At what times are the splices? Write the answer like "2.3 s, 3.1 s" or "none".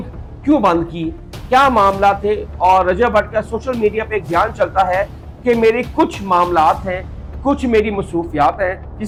none